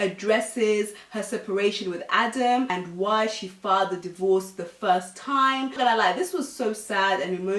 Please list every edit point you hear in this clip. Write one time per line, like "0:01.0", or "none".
0:02.7